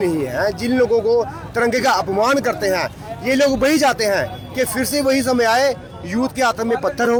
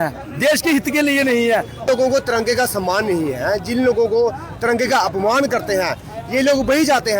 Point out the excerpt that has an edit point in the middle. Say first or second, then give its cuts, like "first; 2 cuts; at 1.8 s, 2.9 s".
second; 1 cut; at 1.9 s